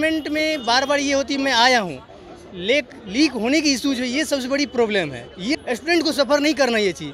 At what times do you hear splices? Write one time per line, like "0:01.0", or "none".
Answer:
0:05.5